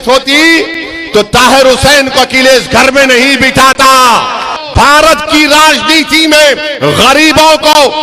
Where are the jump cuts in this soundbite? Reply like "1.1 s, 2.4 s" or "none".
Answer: 4.5 s